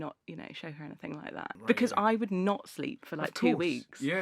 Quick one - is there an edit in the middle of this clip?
yes; 1 cut; at 1.6 s

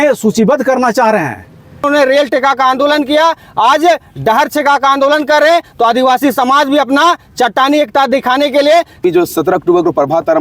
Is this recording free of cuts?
no; 2 cuts; at 1.8 s, 9.0 s

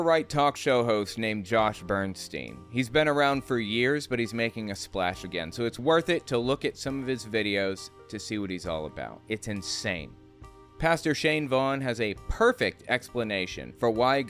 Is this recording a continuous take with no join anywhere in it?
no; 1 cut; at 10.5 s

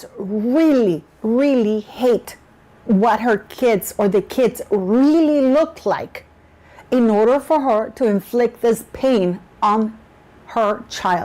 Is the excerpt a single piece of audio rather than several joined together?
yes; 0 cuts

